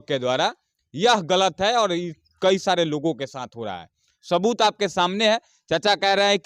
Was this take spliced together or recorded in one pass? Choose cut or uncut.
uncut